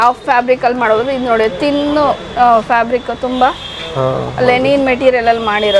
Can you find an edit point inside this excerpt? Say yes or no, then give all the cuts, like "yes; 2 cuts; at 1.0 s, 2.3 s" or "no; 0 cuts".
no; 0 cuts